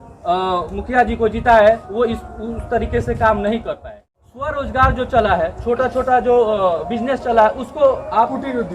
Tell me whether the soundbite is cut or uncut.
cut